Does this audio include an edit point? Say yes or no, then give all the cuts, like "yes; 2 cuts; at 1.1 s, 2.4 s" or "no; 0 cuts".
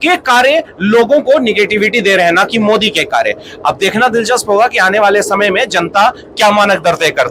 no; 0 cuts